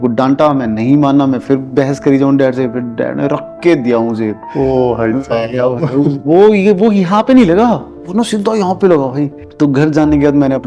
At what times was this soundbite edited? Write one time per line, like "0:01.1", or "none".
0:09.4

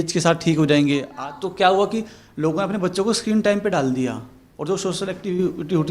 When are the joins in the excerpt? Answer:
0:01.1

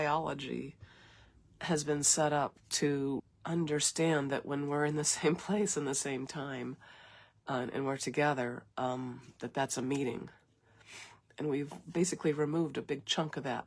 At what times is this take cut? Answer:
0:03.3

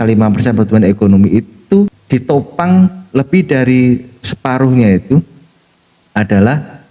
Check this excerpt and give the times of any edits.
0:02.0

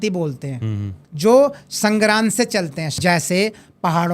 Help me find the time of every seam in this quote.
0:01.0
0:02.9

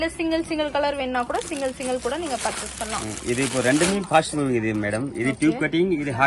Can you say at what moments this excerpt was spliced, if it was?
none

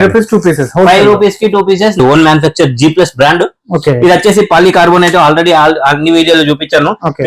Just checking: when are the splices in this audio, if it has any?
0:02.0

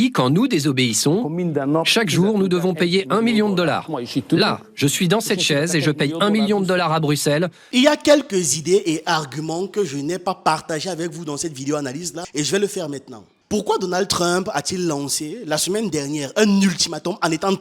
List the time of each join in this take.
0:07.6

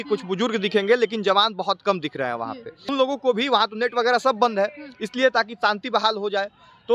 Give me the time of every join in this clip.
0:02.8

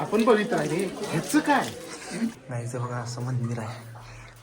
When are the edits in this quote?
0:02.4

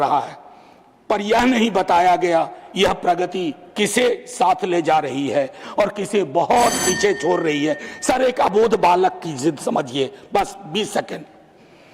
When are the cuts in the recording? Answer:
none

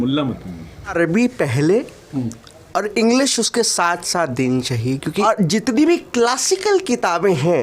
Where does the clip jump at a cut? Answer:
0:00.9
0:05.2

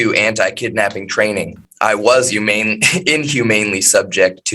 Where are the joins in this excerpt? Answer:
0:01.6

